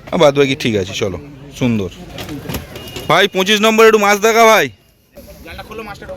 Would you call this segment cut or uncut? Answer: uncut